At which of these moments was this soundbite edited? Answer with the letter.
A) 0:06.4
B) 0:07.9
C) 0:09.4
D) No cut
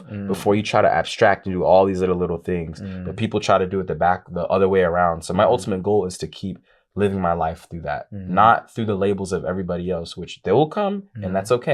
D